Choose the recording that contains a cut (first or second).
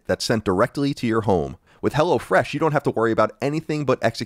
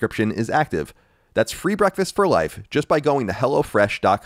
first